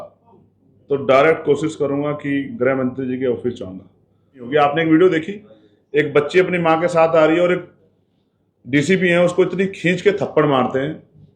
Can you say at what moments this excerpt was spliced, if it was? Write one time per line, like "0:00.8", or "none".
0:04.5